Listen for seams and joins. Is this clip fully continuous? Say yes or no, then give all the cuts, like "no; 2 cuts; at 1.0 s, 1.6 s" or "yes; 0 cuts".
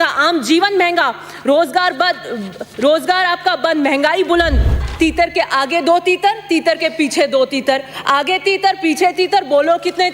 no; 1 cut; at 4.8 s